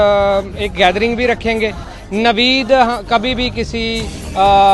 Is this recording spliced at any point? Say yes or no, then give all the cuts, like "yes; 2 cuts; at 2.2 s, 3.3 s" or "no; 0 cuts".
yes; 1 cut; at 1.9 s